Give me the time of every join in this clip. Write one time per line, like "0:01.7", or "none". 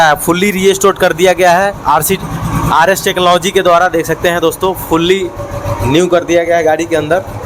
none